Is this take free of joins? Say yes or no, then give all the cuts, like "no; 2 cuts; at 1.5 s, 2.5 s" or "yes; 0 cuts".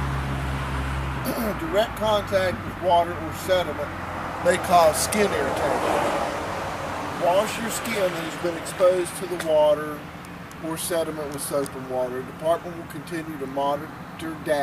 no; 1 cut; at 13.3 s